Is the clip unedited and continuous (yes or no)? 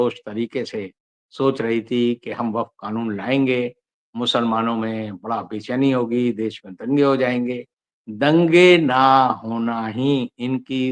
yes